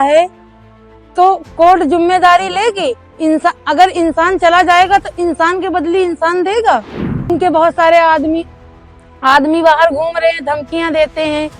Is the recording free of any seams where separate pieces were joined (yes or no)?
no